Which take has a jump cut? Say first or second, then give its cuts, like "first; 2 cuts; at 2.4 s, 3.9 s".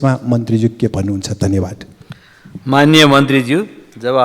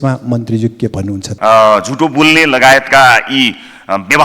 second; 1 cut; at 1.3 s